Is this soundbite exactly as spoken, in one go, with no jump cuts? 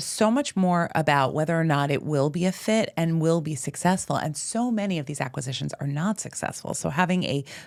yes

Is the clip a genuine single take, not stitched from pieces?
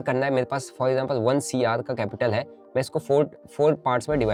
yes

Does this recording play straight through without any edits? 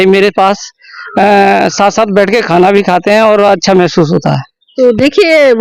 yes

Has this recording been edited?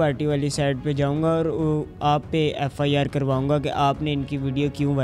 no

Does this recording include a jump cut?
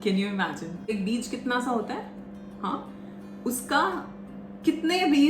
yes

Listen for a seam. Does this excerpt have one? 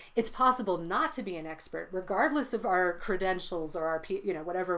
no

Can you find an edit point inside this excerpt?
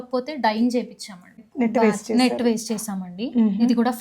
yes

